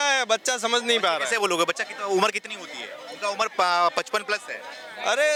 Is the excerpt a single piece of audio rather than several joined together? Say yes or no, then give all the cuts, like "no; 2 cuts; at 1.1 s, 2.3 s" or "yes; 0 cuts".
yes; 0 cuts